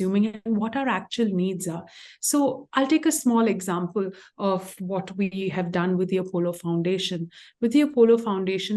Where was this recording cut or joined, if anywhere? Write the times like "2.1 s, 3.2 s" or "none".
none